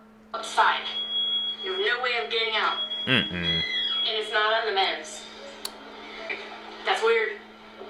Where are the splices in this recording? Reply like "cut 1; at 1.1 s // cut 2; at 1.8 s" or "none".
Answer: cut 1; at 6.3 s